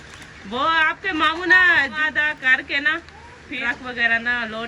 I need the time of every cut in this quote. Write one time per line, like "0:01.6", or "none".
0:02.0
0:03.6